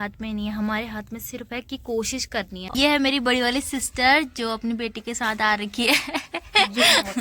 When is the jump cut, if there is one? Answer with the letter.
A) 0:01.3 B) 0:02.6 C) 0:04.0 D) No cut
B